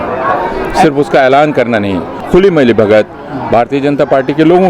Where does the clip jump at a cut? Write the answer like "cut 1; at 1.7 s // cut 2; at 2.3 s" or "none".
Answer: cut 1; at 2.1 s